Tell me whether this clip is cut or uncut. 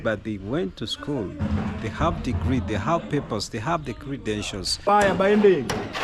cut